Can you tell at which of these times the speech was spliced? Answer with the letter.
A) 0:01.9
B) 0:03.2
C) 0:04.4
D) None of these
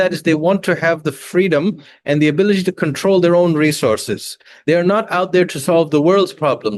D